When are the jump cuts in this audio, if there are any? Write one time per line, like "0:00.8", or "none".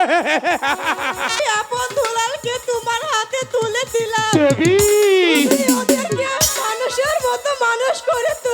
0:01.4

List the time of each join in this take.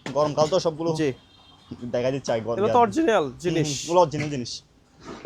none

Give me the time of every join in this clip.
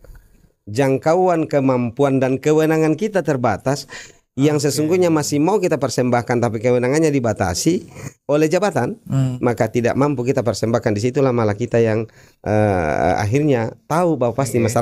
none

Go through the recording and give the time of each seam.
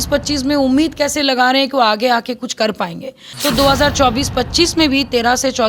0:03.3

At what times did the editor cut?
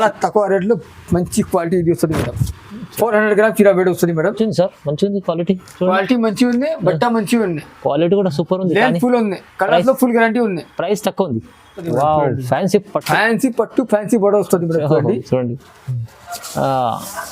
0:04.4
0:11.9

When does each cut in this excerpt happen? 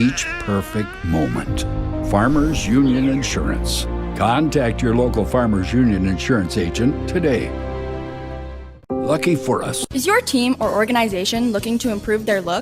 0:11.2

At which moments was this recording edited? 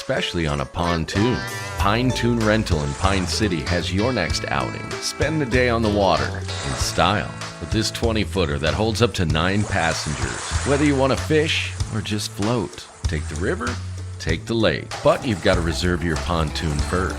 0:06.4

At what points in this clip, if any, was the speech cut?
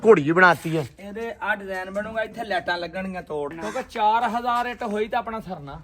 0:03.6

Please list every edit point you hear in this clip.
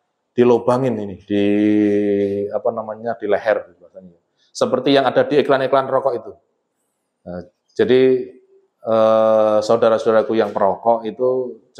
none

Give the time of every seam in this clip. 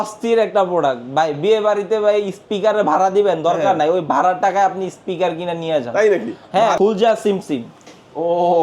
0:06.8

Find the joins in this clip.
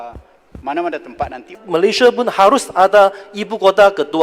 0:01.5

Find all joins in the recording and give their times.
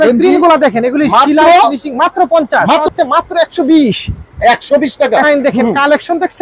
0:02.9
0:05.2

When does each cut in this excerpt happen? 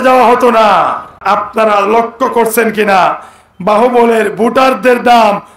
0:01.2

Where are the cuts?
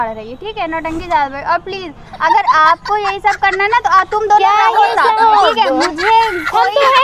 none

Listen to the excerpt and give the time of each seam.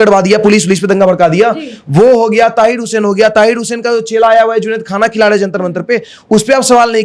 none

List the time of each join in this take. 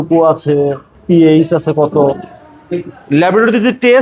0:00.9

